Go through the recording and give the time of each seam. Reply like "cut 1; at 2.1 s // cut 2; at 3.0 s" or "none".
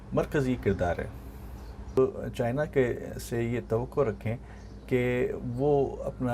cut 1; at 2.0 s